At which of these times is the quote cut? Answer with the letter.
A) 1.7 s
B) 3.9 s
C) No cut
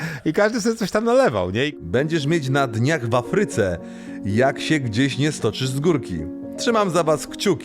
A